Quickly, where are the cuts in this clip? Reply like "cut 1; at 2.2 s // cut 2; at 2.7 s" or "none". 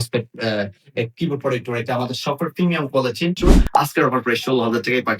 cut 1; at 3.4 s